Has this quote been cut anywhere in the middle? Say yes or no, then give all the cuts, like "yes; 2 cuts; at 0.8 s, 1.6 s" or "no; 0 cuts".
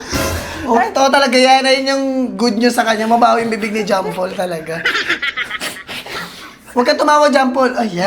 no; 0 cuts